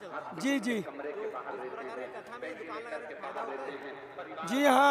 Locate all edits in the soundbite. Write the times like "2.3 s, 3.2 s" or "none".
none